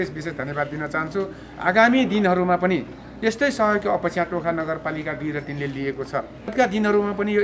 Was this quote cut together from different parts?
yes; 1 cut; at 6.5 s

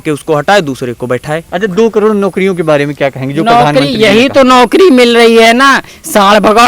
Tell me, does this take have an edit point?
yes; 1 cut; at 1.5 s

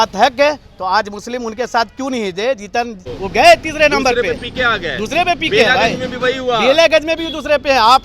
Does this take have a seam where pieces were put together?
yes; 1 cut; at 3.1 s

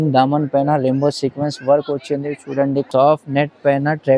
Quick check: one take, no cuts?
no; 1 cut; at 2.9 s

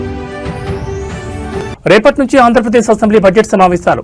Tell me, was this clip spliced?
yes; 1 cut; at 1.4 s

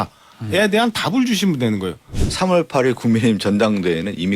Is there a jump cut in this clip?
yes; 1 cut; at 2.1 s

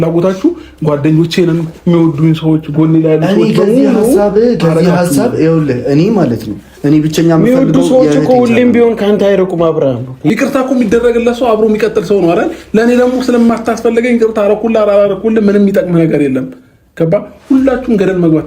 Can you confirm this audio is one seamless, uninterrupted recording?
no; 1 cut; at 10.3 s

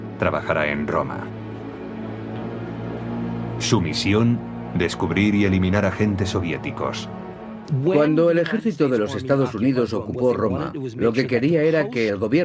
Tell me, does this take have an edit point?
no; 0 cuts

